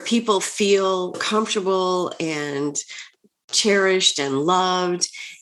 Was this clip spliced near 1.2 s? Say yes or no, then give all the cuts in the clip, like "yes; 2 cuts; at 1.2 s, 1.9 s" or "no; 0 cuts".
yes; 1 cut; at 1.2 s